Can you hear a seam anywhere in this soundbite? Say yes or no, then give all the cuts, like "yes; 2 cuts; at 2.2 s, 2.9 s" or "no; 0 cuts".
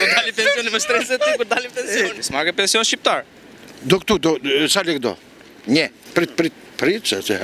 yes; 2 cuts; at 2.2 s, 6.0 s